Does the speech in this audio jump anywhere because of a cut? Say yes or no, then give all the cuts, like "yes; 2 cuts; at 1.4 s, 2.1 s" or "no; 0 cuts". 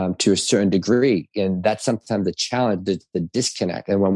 no; 0 cuts